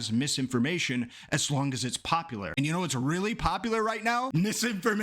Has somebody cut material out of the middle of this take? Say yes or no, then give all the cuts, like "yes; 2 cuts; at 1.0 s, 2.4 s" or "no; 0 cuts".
yes; 2 cuts; at 2.5 s, 4.3 s